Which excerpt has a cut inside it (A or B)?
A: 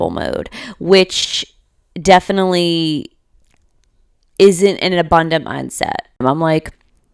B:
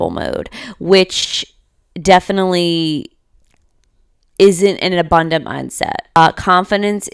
A